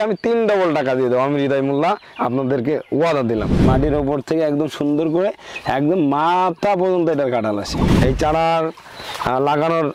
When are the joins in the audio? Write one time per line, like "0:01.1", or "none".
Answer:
0:03.7
0:07.9